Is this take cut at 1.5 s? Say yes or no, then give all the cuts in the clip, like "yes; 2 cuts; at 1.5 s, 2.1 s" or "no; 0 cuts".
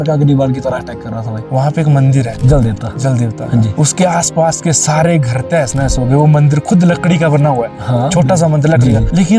yes; 1 cut; at 1.5 s